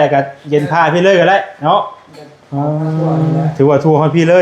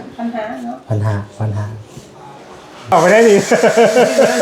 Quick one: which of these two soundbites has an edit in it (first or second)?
second